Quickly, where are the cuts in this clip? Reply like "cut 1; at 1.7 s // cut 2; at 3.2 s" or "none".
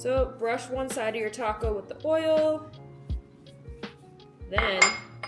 none